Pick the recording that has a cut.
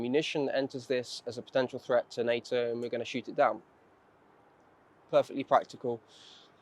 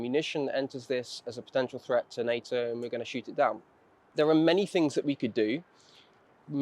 second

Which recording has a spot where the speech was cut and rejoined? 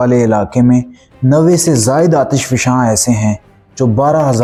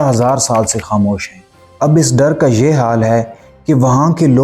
second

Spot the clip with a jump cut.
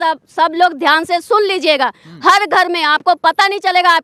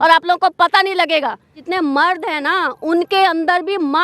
second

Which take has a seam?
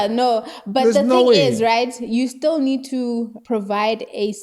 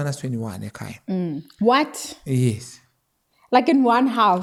first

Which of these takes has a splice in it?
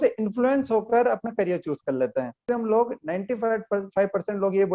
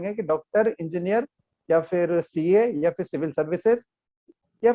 first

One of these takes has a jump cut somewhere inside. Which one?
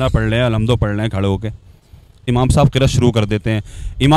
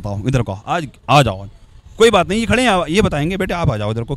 first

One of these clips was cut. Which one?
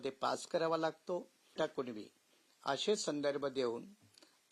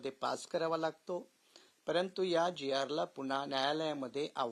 first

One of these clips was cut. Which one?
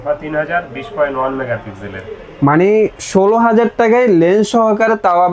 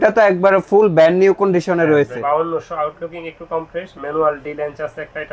second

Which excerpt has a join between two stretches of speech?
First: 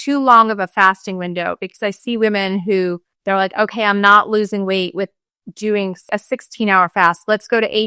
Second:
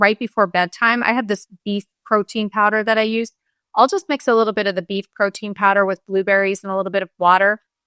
first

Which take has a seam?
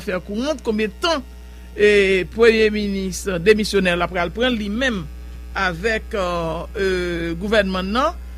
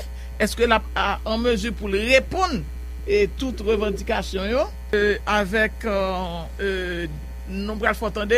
second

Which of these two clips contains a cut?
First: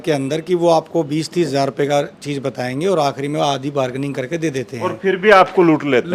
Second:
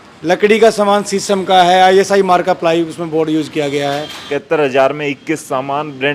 second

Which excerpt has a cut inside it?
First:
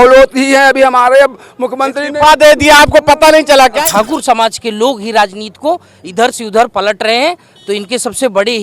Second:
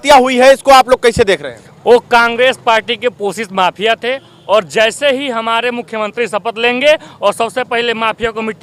first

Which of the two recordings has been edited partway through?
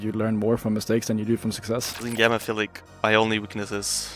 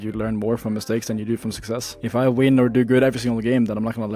first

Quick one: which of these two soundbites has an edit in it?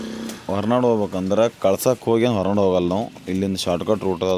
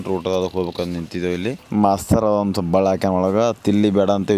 second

